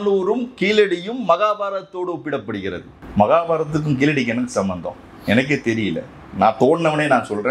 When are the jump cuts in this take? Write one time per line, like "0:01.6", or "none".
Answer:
0:03.0

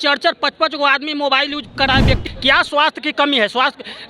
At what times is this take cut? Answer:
0:02.3

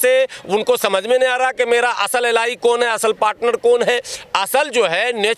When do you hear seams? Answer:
none

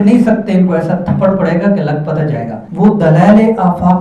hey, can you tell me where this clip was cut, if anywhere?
0:02.6

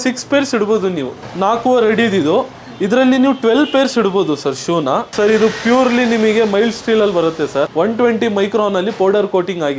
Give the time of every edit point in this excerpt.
0:01.1
0:05.1

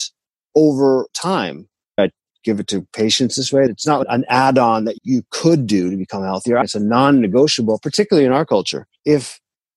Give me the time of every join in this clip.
0:02.0
0:03.7
0:06.7
0:08.8

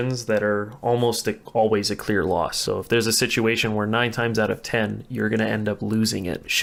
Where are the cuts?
none

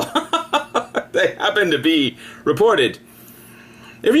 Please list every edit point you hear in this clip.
0:02.9

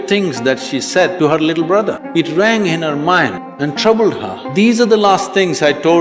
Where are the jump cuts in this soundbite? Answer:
0:01.1
0:02.0
0:03.4
0:04.3

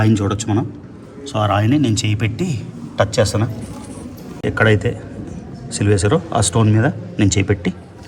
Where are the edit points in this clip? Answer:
0:04.4

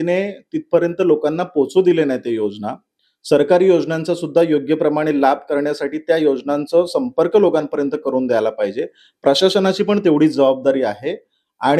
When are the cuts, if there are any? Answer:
none

